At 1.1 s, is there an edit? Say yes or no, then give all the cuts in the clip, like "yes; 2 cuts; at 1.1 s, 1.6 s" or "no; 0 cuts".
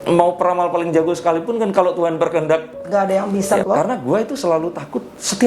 no; 1 cut; at 3.6 s